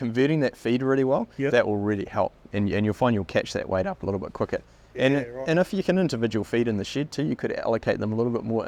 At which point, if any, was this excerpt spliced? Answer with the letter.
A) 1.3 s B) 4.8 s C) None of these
C